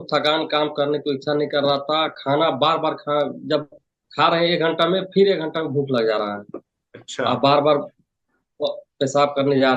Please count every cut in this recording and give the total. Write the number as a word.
zero